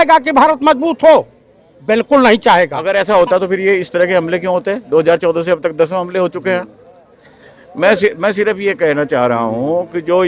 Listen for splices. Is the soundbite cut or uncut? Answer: cut